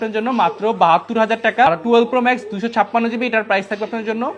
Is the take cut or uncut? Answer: cut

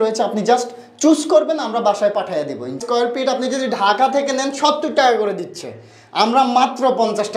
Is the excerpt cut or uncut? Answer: cut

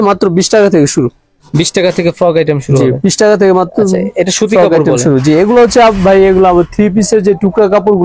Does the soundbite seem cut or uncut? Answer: uncut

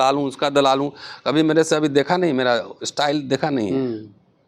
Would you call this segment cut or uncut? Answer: uncut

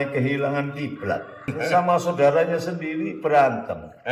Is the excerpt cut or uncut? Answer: cut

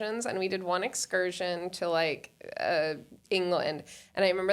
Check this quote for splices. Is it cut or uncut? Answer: uncut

